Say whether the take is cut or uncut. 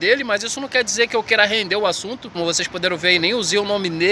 cut